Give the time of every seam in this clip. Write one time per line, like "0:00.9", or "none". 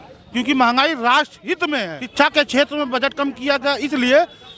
0:02.1